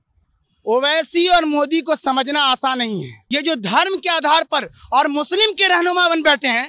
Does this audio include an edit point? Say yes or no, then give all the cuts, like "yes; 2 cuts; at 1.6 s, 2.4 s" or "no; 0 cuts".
yes; 1 cut; at 3.2 s